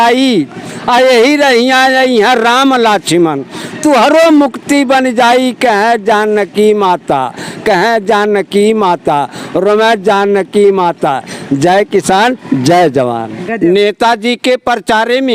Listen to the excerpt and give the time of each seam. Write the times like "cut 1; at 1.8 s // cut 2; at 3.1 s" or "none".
cut 1; at 13.4 s